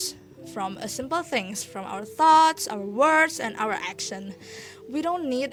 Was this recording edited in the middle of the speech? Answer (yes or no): no